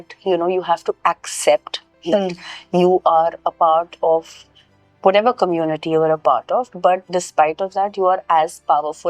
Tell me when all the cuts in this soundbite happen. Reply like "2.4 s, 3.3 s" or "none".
none